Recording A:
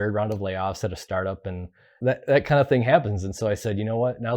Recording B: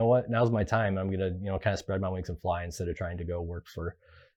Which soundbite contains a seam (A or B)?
A